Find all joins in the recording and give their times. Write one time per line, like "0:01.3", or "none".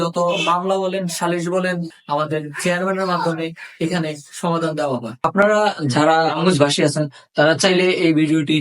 0:01.9
0:05.2